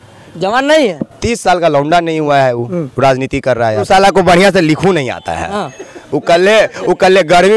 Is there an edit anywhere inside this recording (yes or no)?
yes